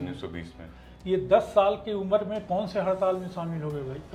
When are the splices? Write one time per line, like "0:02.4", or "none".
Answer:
none